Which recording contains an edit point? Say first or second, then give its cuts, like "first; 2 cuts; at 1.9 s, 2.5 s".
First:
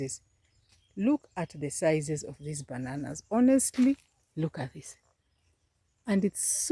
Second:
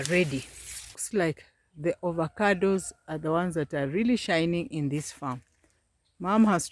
second; 1 cut; at 1.0 s